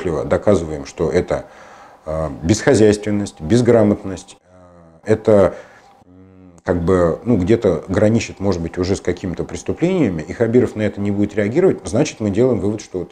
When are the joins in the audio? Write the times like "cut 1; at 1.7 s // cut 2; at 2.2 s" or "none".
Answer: none